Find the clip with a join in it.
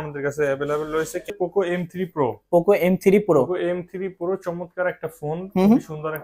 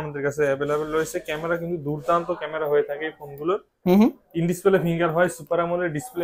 first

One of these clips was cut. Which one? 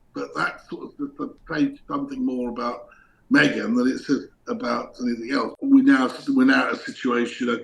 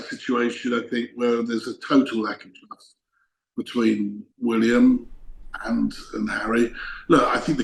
first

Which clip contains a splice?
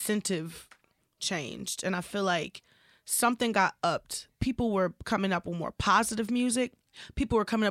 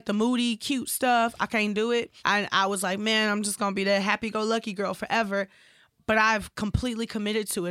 first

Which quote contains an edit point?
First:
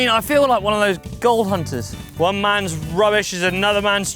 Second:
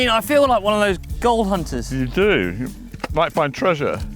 first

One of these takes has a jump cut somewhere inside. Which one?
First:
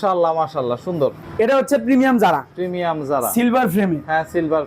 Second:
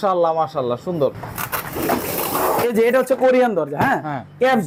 first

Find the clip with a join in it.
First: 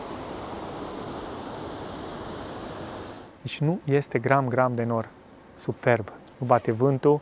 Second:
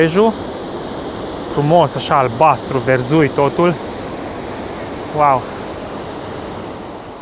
first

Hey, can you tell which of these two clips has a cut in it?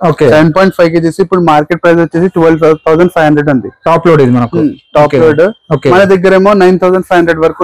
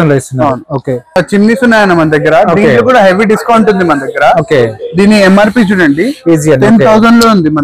second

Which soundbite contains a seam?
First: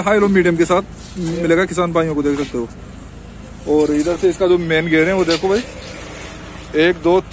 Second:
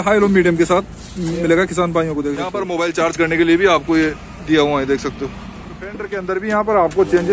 second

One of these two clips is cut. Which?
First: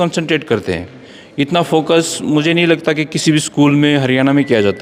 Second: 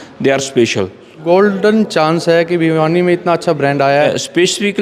second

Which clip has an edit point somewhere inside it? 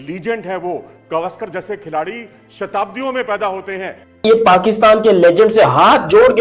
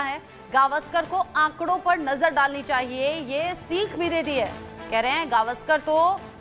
first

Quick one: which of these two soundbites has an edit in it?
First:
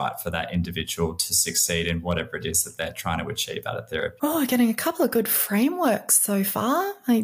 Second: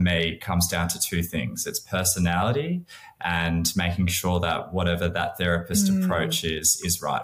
first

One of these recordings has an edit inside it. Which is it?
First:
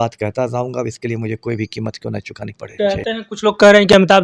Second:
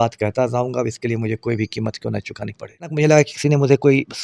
second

